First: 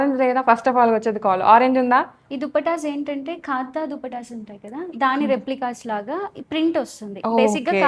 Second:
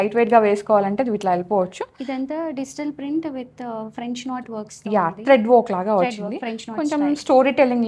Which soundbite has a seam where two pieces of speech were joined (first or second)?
first